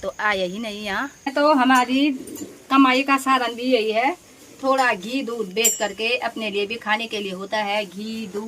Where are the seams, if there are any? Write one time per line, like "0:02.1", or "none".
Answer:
0:01.3